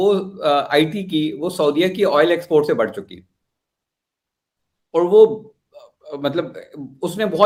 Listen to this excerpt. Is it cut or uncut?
uncut